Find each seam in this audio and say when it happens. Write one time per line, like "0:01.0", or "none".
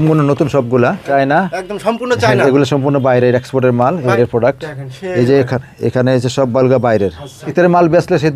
0:01.1
0:04.1
0:07.3